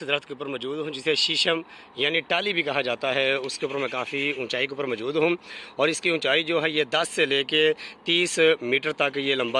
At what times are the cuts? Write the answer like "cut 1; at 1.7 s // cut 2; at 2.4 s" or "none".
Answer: none